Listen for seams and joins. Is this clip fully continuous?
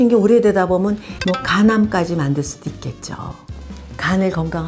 no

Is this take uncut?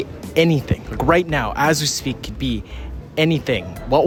yes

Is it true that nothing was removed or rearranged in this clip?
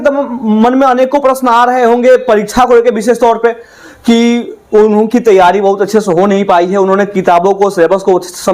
yes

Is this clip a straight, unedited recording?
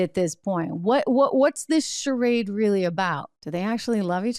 no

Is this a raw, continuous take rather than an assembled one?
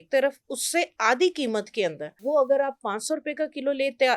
no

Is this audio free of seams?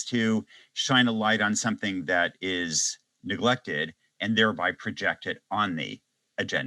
yes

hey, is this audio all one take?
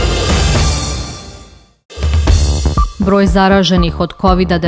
no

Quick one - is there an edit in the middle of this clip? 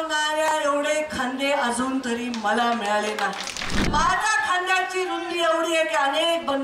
yes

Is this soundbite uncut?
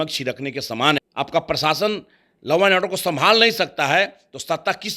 no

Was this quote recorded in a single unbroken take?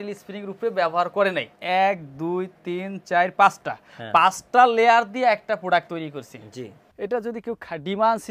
no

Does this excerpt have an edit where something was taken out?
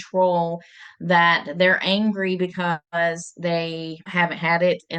yes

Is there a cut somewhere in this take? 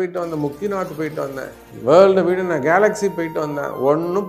no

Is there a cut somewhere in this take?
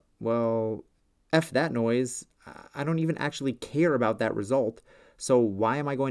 no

